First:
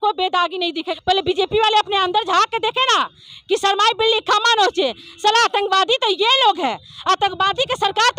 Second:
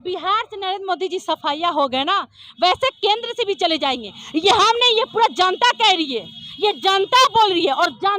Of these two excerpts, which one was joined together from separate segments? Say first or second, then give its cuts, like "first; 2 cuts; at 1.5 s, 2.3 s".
first; 1 cut; at 0.9 s